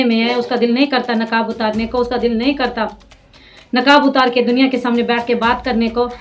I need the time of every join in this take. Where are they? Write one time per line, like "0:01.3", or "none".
none

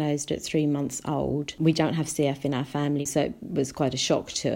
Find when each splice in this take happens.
0:01.6
0:03.1

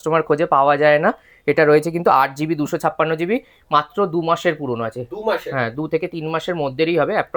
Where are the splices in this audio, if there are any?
none

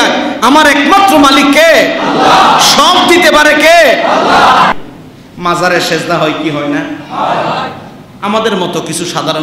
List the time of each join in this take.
0:04.7

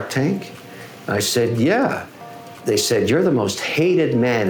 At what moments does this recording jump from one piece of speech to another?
0:02.6

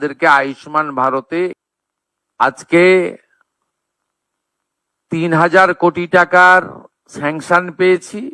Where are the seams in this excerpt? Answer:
0:01.6

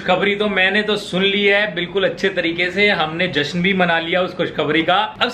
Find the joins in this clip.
none

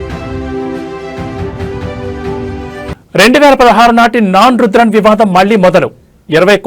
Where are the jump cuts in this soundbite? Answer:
0:02.9

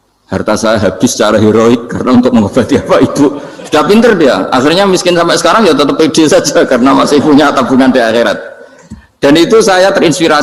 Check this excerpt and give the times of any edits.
none

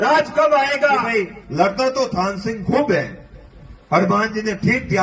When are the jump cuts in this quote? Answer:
0:01.1

